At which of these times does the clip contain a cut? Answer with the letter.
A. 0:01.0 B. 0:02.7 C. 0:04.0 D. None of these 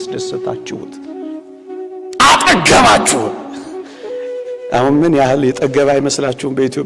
D